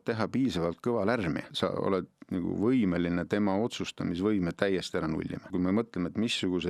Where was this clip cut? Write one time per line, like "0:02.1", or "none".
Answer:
0:01.5
0:05.5